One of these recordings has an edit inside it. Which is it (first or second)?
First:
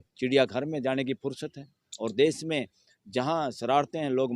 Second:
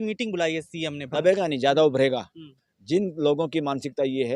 second